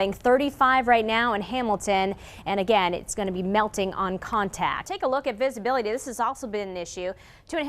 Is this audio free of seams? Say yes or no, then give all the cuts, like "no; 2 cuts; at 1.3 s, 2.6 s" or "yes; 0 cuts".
no; 1 cut; at 4.9 s